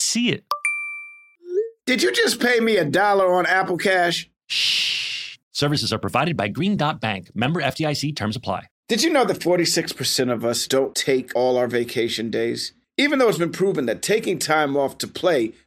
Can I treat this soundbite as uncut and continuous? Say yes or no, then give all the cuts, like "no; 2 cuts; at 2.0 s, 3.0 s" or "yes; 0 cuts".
no; 1 cut; at 8.7 s